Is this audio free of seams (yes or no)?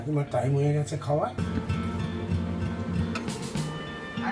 no